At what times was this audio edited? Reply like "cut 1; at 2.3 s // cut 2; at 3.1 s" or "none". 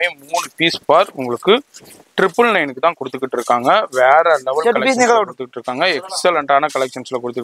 none